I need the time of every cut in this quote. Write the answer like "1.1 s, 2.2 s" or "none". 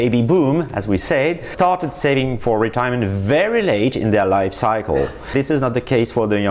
1.5 s